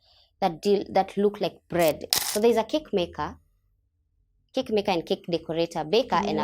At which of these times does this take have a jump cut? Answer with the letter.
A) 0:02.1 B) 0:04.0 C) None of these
A